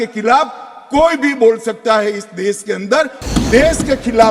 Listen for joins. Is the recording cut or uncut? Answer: cut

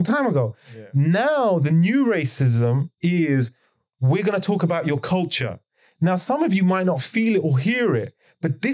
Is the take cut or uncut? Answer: uncut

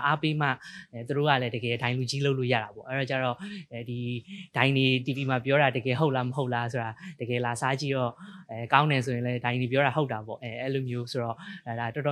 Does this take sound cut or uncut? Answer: uncut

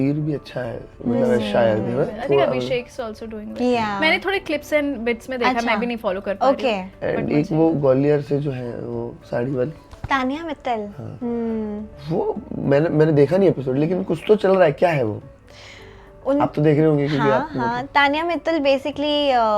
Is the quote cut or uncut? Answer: uncut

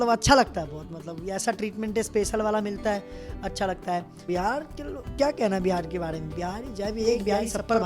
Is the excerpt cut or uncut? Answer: cut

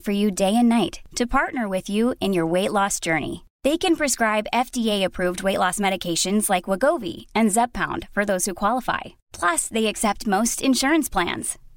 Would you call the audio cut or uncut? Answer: uncut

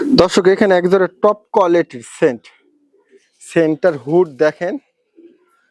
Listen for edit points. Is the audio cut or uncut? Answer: uncut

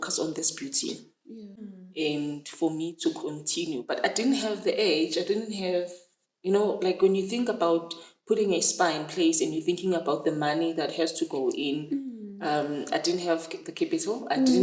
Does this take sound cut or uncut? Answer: cut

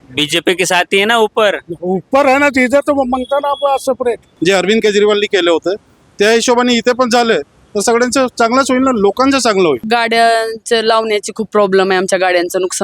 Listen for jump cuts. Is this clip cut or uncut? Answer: cut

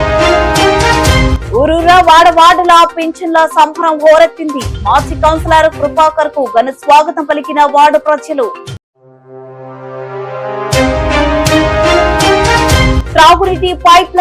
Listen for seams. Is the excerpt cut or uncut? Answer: cut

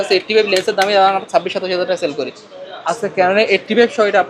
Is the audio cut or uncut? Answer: uncut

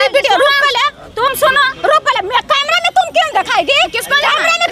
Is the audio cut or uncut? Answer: uncut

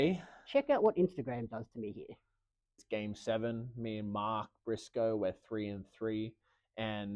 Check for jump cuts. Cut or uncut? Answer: cut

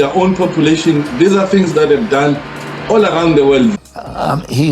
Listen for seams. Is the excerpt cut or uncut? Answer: cut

